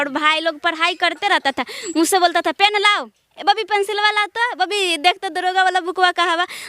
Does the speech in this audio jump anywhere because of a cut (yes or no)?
no